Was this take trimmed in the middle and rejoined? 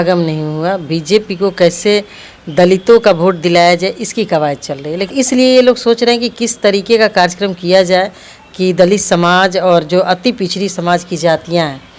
yes; 1 cut; at 5.1 s

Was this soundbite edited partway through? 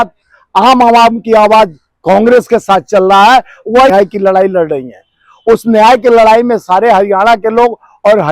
yes; 1 cut; at 3.9 s

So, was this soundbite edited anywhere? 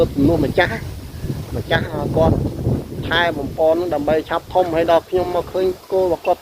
no; 0 cuts

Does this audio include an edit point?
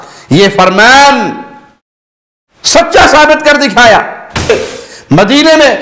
yes; 1 cut; at 4.5 s

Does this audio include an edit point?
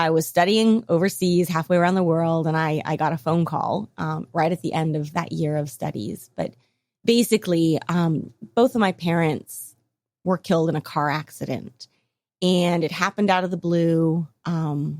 no; 0 cuts

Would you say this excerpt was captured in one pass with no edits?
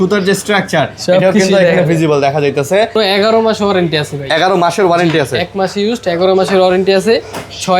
no; 1 cut; at 3.0 s

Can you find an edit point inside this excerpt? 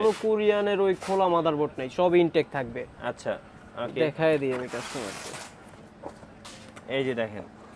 no; 0 cuts

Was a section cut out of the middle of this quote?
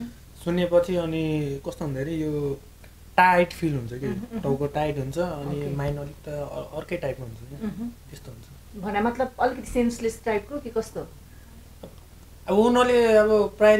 no; 0 cuts

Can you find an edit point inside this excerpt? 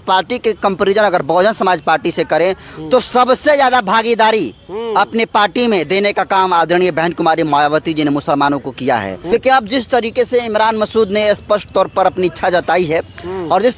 yes; 1 cut; at 9.3 s

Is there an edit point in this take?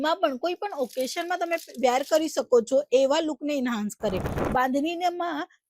yes; 1 cut; at 4.3 s

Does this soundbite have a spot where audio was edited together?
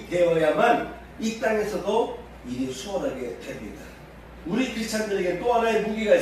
yes; 1 cut; at 4.3 s

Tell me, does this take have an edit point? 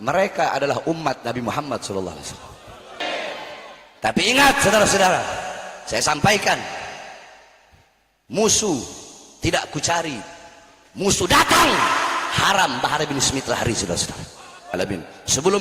yes; 2 cuts; at 3.0 s, 14.7 s

